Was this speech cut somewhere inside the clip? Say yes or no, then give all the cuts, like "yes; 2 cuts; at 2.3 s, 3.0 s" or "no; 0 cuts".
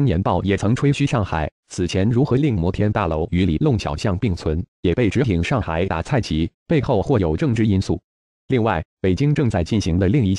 no; 0 cuts